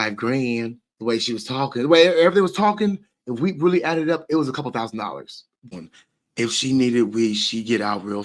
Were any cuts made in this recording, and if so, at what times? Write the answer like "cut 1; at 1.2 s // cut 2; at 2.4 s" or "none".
cut 1; at 5.7 s